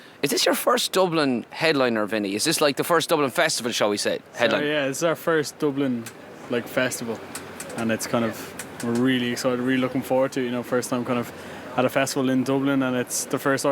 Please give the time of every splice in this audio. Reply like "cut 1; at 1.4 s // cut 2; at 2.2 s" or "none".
cut 1; at 12.8 s